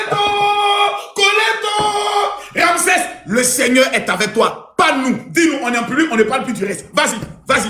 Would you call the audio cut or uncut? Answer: uncut